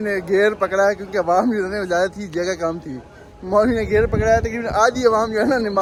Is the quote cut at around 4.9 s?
no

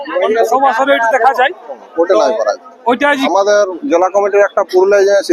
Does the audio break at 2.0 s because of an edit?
no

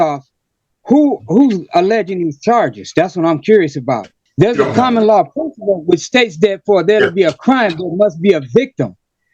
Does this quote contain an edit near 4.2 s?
yes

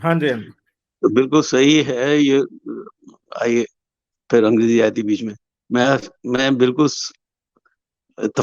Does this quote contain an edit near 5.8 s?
no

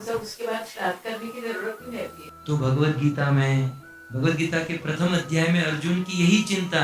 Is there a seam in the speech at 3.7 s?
no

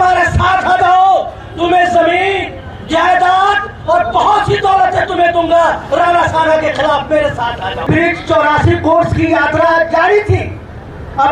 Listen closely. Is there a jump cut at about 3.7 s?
no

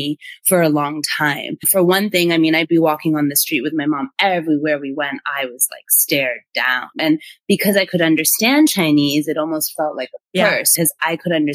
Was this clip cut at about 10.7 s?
yes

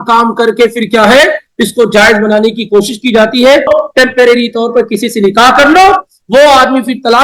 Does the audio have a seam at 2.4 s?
no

